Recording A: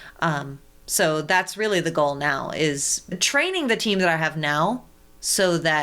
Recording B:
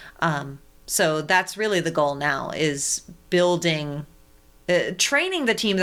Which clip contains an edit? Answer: A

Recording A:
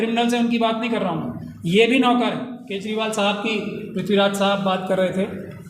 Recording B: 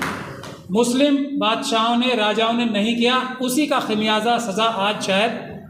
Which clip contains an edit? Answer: A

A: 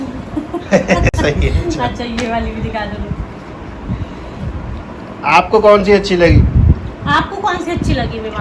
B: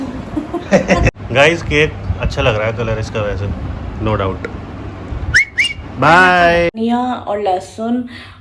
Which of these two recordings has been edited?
B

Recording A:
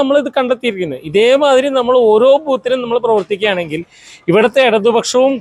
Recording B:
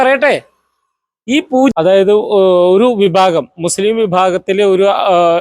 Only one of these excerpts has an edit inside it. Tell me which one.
B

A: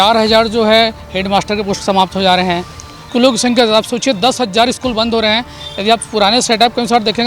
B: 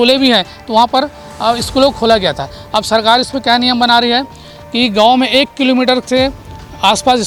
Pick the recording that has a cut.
A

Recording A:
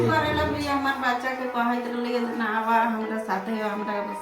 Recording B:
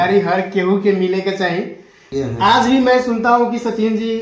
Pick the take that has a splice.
B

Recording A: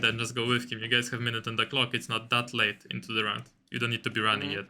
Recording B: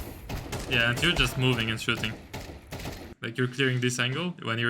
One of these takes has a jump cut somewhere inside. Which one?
B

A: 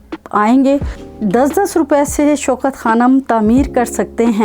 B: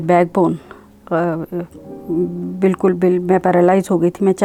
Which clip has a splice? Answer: A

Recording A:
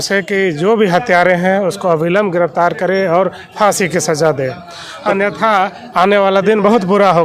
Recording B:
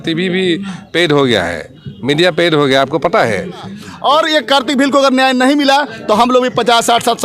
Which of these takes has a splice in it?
B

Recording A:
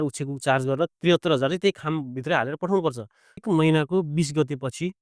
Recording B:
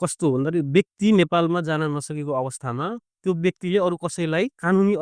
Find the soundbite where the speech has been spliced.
A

